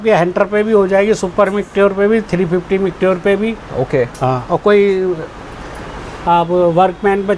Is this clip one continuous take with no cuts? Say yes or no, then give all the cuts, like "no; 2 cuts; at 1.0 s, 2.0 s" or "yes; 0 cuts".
yes; 0 cuts